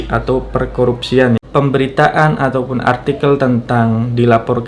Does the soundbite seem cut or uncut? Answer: cut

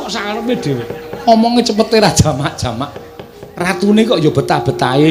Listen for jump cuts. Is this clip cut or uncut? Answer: uncut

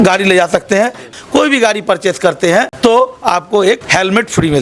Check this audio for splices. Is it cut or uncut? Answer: cut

